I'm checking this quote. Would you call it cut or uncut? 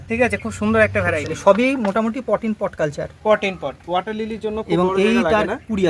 cut